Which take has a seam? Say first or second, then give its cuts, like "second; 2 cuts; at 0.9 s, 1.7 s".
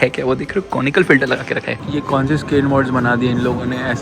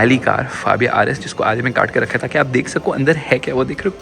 first; 1 cut; at 1.7 s